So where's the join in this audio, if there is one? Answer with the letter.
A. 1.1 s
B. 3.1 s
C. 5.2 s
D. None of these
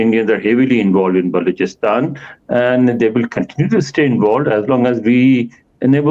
D